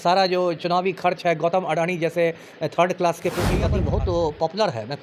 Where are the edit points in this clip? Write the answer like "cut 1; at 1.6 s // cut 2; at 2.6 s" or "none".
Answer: cut 1; at 3.7 s